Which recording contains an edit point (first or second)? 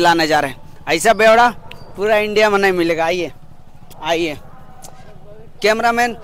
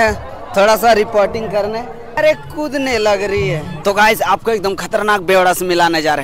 second